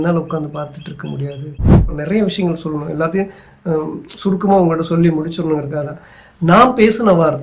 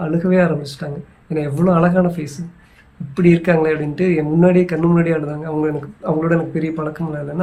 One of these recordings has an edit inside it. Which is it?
first; 1 cut; at 1.9 s

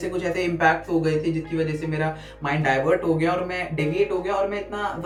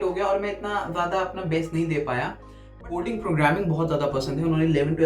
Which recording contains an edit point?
second; 1 cut; at 2.6 s

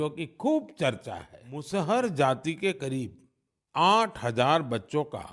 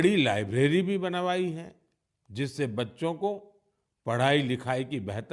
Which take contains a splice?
first; 1 cut; at 1.6 s

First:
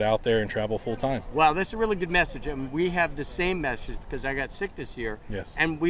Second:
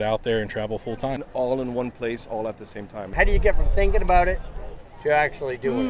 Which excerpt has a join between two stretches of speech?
second; 2 cuts; at 1.3 s, 3.1 s

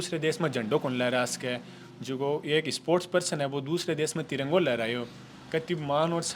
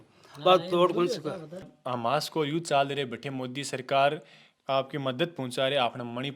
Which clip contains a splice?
second; 1 cut; at 1.7 s

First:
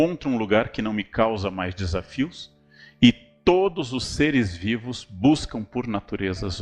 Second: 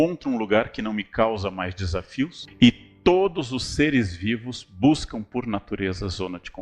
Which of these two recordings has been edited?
second; 1 cut; at 2.4 s

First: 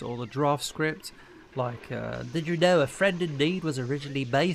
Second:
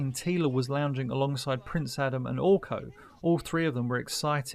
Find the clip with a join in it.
first; 1 cut; at 2.2 s

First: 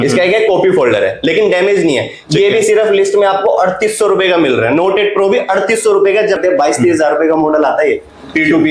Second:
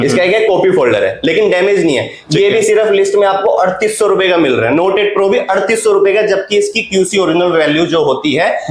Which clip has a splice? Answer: first; 1 cut; at 6.4 s

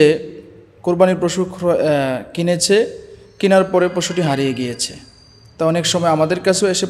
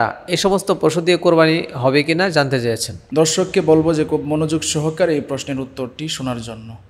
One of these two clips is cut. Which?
second; 1 cut; at 2.9 s

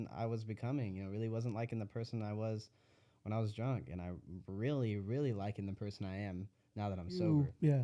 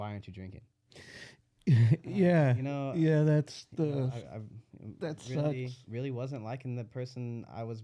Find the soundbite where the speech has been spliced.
second; 1 cut; at 5.8 s

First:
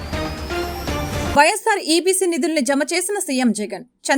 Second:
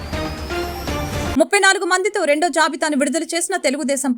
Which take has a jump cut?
second; 1 cut; at 1.3 s

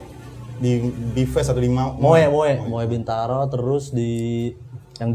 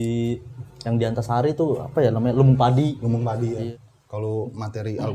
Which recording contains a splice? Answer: second; 1 cut; at 3.6 s

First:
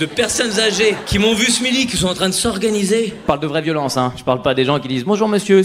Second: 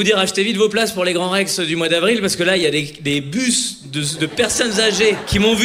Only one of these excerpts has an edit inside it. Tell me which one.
first; 1 cut; at 3.2 s

